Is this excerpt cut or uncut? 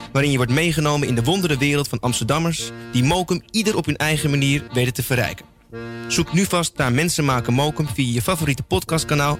uncut